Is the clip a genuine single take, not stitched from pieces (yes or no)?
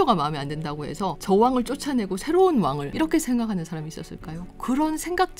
no